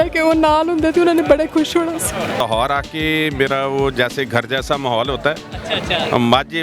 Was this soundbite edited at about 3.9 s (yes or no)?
no